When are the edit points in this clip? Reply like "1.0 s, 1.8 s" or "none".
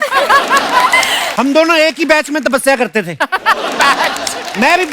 1.2 s